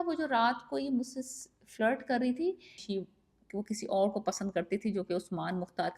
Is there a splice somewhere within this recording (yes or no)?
yes